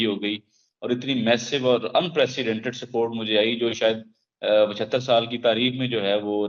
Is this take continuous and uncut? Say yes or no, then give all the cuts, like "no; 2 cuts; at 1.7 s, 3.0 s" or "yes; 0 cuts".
yes; 0 cuts